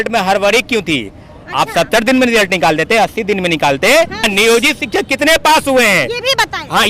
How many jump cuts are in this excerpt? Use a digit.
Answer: 1